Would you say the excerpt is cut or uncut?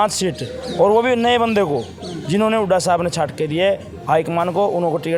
uncut